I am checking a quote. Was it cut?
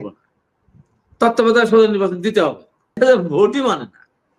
yes; 1 cut; at 3.0 s

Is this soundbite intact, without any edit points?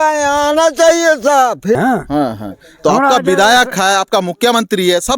no; 1 cut; at 1.8 s

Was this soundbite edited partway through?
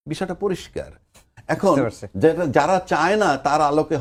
no; 0 cuts

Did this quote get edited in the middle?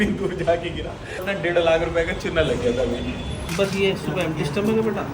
yes; 2 cuts; at 1.2 s, 3.4 s

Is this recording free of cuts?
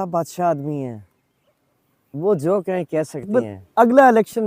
no; 1 cut; at 3.3 s

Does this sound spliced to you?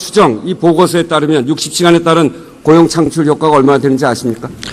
no; 0 cuts

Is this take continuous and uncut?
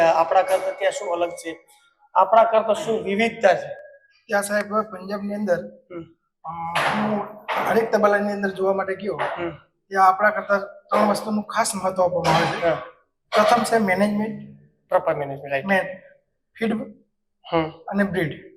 yes; 0 cuts

